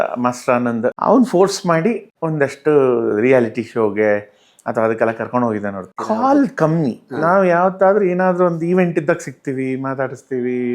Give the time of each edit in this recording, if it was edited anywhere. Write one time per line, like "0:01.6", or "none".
0:01.0
0:05.9